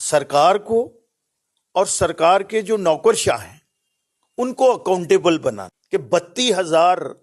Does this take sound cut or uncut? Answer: cut